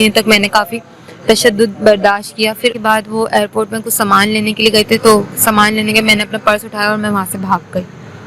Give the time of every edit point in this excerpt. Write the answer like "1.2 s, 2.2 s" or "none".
2.8 s